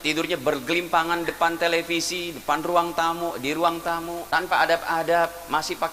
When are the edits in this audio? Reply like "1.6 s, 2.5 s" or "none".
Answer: 4.2 s